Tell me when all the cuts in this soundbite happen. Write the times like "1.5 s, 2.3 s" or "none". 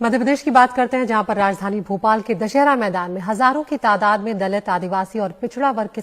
1.2 s